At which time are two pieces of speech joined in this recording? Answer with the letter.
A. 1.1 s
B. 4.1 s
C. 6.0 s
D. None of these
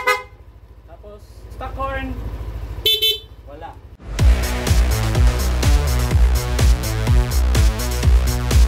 B